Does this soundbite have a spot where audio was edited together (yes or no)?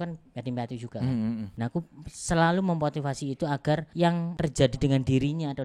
yes